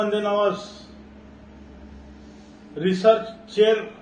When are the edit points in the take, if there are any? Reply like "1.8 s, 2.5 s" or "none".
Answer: none